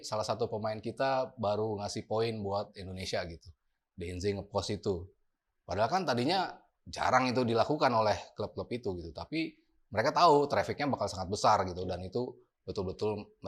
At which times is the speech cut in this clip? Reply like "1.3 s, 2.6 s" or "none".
none